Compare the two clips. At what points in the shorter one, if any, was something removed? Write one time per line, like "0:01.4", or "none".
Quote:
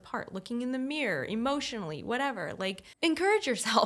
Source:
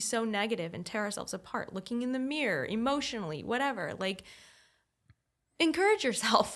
0:02.9